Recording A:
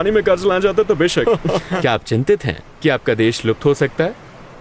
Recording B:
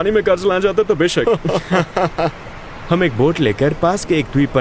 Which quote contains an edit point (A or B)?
A